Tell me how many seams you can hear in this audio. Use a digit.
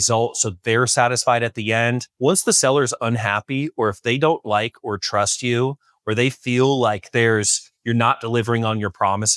1